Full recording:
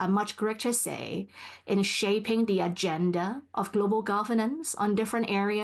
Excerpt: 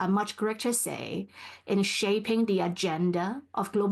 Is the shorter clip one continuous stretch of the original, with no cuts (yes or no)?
yes